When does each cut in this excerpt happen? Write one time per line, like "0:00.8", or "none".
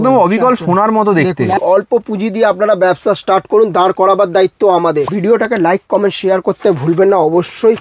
0:01.6
0:05.1